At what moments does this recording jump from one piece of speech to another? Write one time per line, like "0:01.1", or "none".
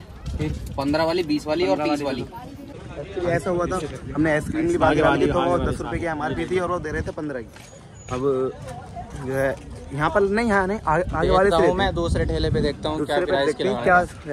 0:02.9